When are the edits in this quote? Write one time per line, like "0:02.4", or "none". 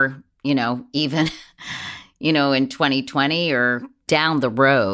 0:03.9